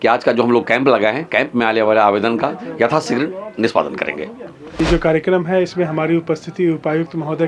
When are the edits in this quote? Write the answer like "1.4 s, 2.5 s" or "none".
4.8 s

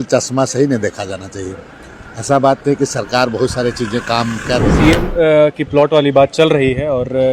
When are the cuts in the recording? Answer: 4.7 s

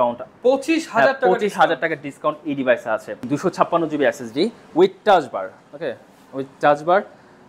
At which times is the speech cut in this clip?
3.2 s

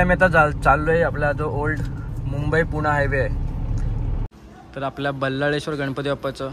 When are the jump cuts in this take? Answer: 4.3 s

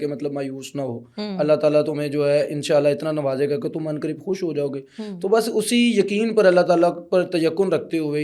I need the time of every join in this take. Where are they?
none

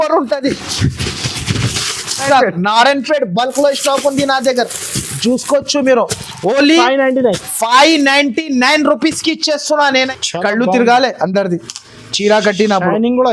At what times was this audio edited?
2.2 s, 10.1 s

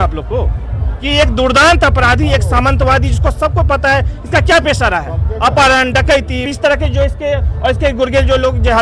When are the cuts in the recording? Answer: none

